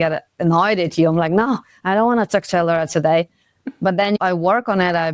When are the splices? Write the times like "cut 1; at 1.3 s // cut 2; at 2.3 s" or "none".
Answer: cut 1; at 4.2 s